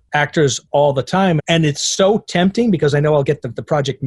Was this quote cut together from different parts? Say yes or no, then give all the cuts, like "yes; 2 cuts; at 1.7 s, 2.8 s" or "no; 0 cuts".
yes; 1 cut; at 1.4 s